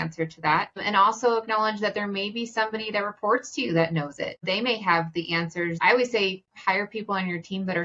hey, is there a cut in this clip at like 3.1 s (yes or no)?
no